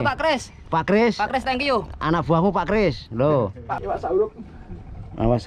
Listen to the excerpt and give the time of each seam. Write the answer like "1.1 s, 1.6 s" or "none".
3.6 s

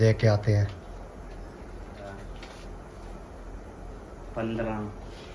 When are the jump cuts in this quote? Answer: 2.1 s

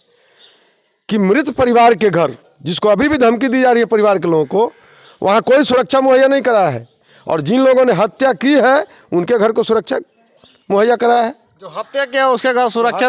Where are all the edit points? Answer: none

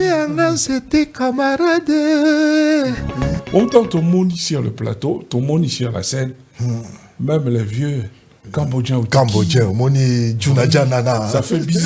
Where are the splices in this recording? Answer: 3.4 s

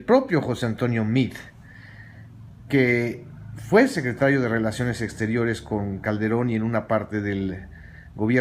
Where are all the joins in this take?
6.0 s

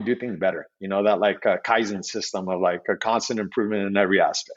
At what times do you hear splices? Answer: none

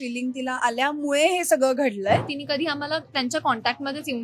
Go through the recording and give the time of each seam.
2.3 s

